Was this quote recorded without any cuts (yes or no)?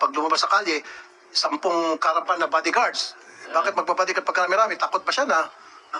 yes